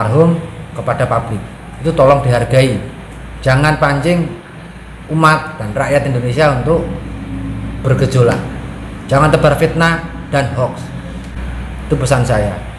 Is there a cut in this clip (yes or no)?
no